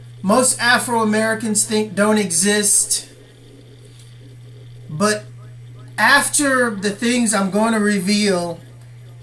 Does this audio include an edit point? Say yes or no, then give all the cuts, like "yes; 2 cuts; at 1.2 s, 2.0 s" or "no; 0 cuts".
no; 0 cuts